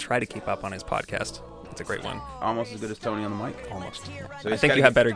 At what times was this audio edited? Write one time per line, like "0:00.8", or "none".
0:01.8
0:04.1